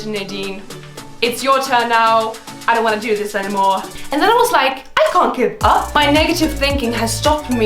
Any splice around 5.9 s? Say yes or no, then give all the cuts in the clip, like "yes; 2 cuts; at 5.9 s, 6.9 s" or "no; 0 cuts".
yes; 2 cuts; at 4.0 s, 5.9 s